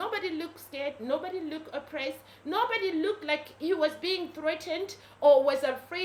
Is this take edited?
no; 0 cuts

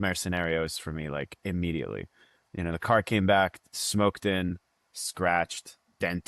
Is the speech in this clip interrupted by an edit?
no; 0 cuts

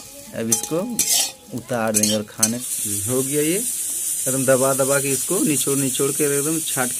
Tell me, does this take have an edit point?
yes; 1 cut; at 2.6 s

